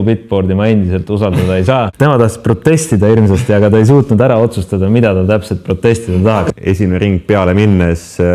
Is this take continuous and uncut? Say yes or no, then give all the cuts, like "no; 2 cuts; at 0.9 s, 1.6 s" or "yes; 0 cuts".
no; 2 cuts; at 1.9 s, 6.5 s